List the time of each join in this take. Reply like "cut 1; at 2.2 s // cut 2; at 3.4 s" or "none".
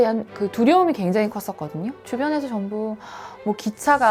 none